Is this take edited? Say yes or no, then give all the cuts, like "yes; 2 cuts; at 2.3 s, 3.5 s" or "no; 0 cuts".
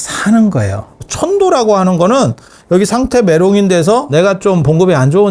yes; 2 cuts; at 1.1 s, 4.1 s